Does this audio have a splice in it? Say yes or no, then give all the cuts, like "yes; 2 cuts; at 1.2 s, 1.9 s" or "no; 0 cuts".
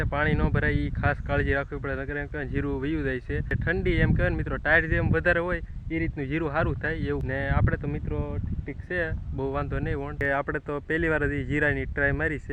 yes; 3 cuts; at 3.5 s, 7.2 s, 10.1 s